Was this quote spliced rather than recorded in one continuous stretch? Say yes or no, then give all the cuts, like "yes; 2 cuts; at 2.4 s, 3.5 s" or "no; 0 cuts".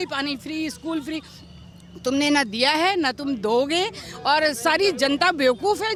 no; 0 cuts